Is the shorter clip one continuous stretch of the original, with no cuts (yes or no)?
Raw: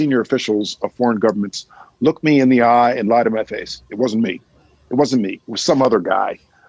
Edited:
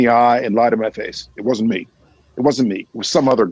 yes